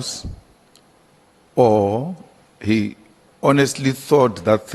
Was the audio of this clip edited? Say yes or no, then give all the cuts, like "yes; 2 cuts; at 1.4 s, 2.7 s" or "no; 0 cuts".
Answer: no; 0 cuts